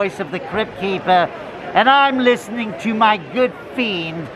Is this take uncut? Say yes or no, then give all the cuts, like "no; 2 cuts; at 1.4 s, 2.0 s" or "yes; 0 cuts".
yes; 0 cuts